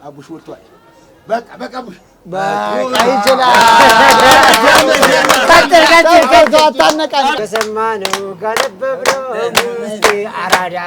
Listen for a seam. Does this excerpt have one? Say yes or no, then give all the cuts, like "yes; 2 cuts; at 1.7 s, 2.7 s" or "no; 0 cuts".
yes; 1 cut; at 7.4 s